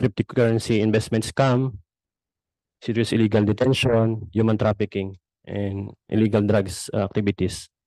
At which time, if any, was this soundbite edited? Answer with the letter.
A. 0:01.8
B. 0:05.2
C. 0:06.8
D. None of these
D